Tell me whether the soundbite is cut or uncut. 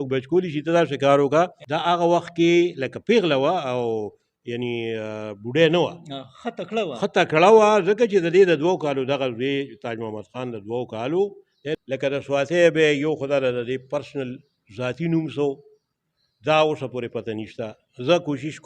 cut